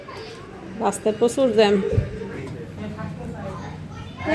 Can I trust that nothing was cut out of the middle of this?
no; 1 cut; at 2.4 s

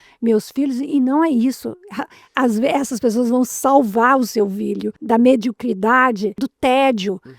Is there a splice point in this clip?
yes; 2 cuts; at 5.0 s, 6.5 s

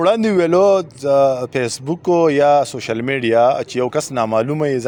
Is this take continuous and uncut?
yes; 0 cuts

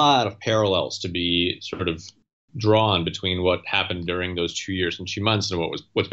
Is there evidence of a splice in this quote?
no; 0 cuts

